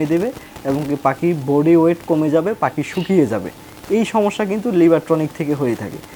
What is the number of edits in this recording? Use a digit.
0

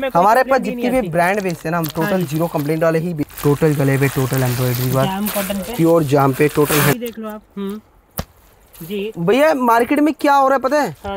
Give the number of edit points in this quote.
2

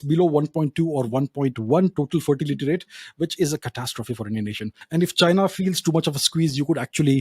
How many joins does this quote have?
1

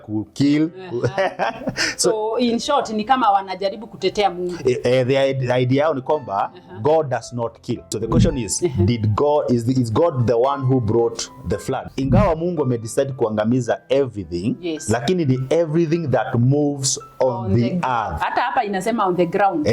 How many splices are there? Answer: 2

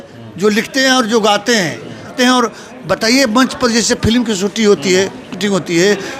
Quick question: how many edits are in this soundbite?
1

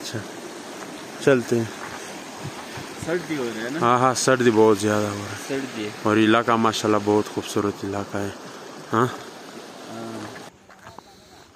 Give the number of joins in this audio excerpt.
1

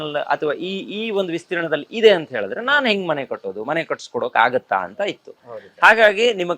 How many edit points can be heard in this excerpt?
0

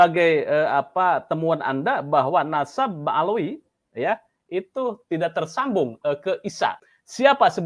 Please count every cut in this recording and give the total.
1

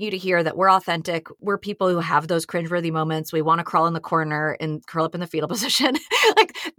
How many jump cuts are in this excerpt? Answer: 1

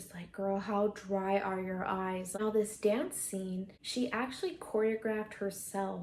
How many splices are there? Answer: 2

